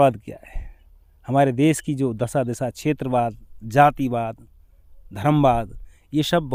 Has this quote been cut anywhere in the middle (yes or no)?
no